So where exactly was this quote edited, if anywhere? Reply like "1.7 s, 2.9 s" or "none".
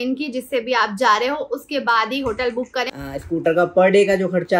2.9 s

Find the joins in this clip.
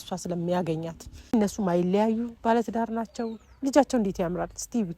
1.3 s

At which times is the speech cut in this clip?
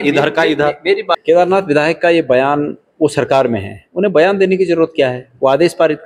1.1 s

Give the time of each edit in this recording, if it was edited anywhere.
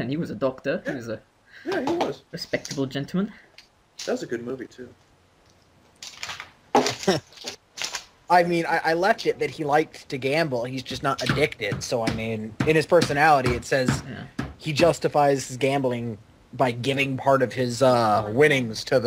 none

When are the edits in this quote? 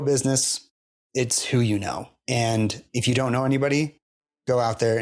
2.8 s

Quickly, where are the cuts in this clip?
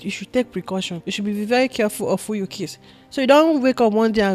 1.0 s

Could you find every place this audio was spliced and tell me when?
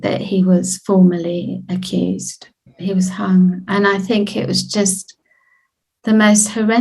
2.7 s

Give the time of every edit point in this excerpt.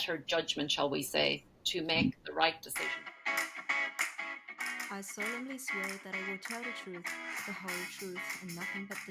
3.1 s

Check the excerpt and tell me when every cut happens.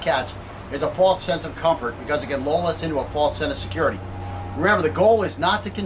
none

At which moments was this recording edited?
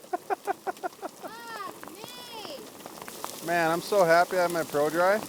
3.1 s

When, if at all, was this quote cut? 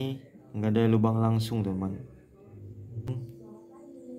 3.2 s

